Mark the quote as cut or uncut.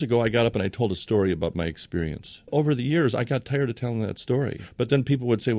cut